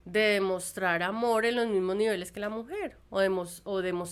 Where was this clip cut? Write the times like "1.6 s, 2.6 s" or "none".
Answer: none